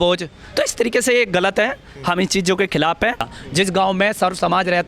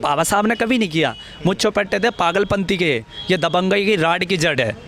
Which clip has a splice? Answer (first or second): first